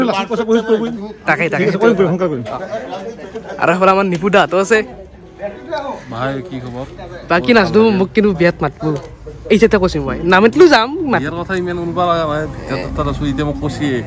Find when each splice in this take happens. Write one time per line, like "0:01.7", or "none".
none